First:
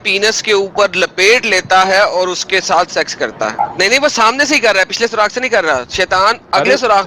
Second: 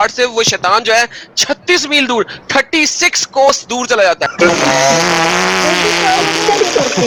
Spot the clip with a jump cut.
first; 1 cut; at 3.6 s

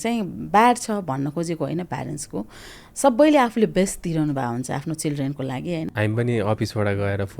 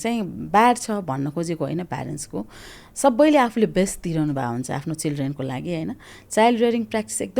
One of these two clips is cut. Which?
first; 1 cut; at 6.2 s

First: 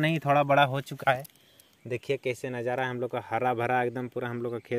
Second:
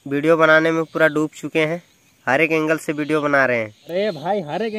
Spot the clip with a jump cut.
second; 1 cut; at 3.8 s

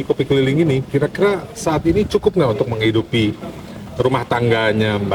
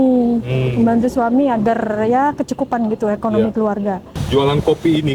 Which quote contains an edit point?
second; 1 cut; at 4.1 s

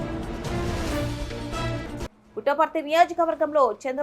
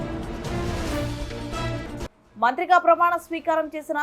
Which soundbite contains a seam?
first; 1 cut; at 2.2 s

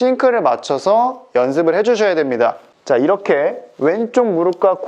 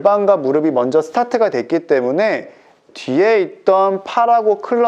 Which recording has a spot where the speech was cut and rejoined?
first; 1 cut; at 2.7 s

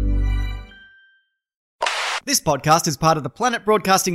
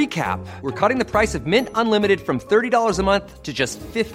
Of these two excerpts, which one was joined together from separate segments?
first; 1 cut; at 2.0 s

